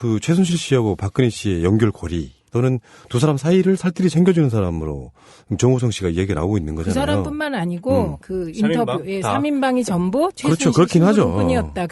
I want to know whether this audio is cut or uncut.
cut